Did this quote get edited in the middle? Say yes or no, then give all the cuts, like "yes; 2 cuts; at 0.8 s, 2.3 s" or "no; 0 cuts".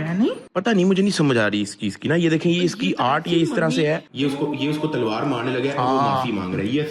no; 0 cuts